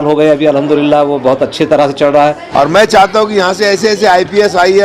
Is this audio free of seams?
no; 1 cut; at 2.4 s

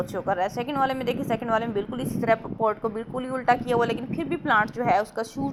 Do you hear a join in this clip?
no; 0 cuts

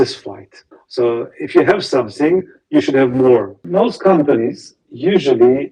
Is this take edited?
yes; 1 cut; at 3.6 s

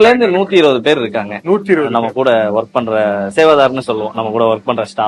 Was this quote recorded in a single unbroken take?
no; 1 cut; at 3.3 s

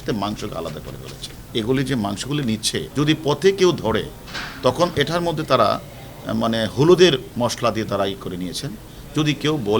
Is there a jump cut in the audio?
yes; 3 cuts; at 1.4 s, 2.9 s, 7.3 s

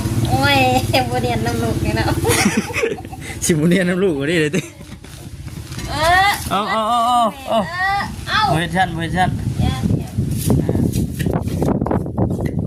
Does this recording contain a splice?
no; 0 cuts

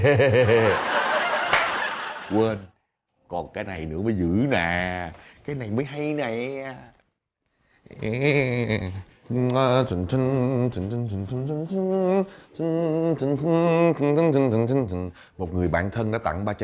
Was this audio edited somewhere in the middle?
no; 0 cuts

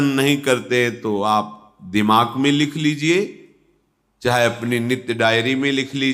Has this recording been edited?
no; 0 cuts

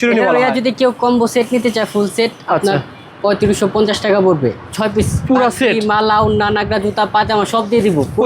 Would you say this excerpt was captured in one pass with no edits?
yes; 0 cuts

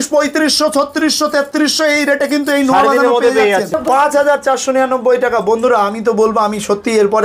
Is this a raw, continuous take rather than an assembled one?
no; 1 cut; at 3.7 s

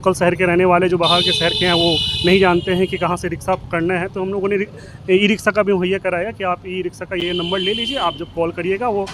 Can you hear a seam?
no; 0 cuts

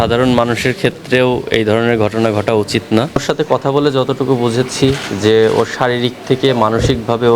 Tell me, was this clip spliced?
yes; 1 cut; at 3.2 s

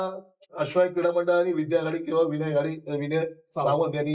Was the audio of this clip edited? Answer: no; 0 cuts

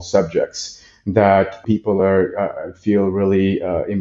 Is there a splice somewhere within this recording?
yes; 1 cut; at 1.6 s

